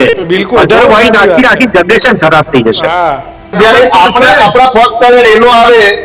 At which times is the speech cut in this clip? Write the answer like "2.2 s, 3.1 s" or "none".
3.5 s